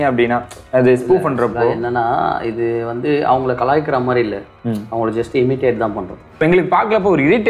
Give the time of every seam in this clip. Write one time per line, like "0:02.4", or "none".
0:06.4